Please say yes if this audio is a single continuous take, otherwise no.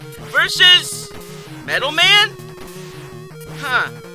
yes